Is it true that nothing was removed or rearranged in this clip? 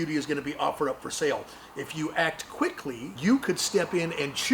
no; 1 cut; at 3.1 s

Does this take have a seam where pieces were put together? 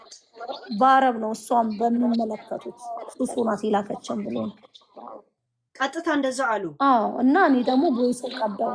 no; 0 cuts

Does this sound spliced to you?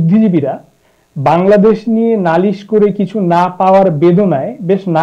no; 0 cuts

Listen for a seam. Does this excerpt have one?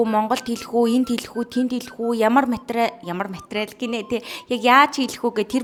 no; 0 cuts

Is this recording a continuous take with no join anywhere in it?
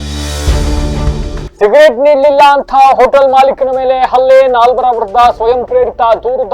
no; 1 cut; at 1.4 s

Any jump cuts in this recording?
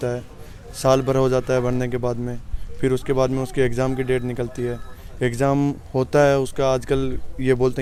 no; 0 cuts

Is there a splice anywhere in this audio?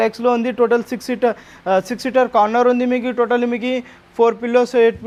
no; 0 cuts

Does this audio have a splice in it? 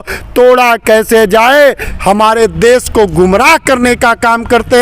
yes; 1 cut; at 1.8 s

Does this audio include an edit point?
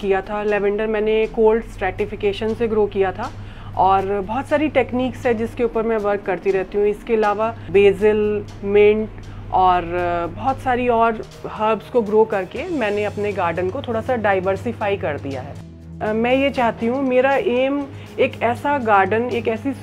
yes; 2 cuts; at 7.6 s, 16.0 s

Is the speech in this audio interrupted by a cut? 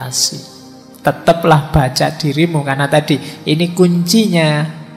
no; 0 cuts

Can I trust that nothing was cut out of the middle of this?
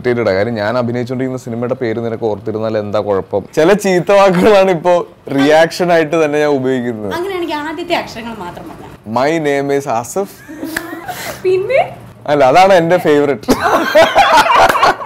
no; 3 cuts; at 3.5 s, 8.9 s, 11.0 s

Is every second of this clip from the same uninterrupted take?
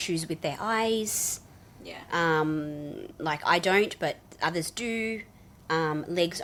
yes; 0 cuts

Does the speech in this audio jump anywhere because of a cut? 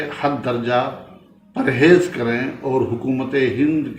no; 0 cuts

